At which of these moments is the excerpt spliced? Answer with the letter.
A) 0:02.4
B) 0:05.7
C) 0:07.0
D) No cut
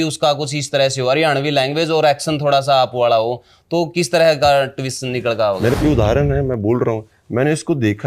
B